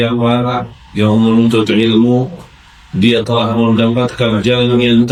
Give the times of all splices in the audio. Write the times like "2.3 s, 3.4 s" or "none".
none